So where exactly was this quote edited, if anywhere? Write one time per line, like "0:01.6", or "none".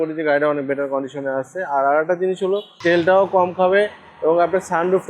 0:02.7